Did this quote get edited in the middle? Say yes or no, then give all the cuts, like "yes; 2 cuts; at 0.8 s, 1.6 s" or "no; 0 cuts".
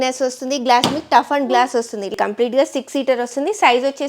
yes; 1 cut; at 2.1 s